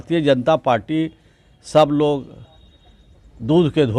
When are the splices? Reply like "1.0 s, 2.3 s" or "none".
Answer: none